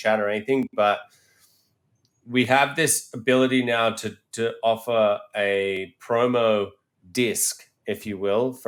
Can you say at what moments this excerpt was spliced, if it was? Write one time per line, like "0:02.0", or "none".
none